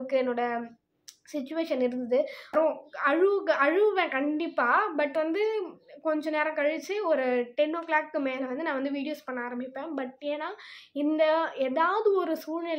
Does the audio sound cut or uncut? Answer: cut